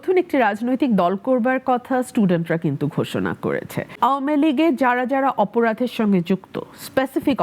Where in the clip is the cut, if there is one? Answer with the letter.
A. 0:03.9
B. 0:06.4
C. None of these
A